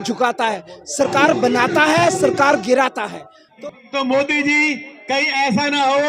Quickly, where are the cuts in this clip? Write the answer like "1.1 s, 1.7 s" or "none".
3.5 s